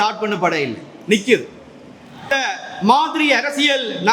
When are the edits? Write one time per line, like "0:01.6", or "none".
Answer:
0:02.3